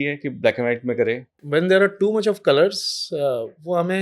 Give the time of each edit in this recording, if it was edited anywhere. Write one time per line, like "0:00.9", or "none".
0:01.4